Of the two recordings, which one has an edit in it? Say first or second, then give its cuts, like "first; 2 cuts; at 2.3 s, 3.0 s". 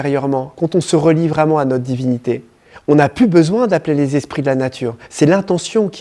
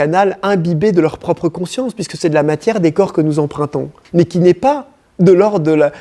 second; 1 cut; at 3.9 s